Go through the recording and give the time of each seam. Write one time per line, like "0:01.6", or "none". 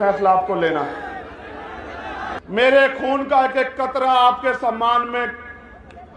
0:02.3